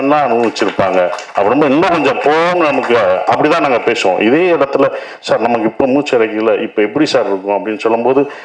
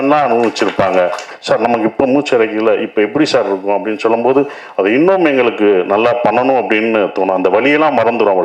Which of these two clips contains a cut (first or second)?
second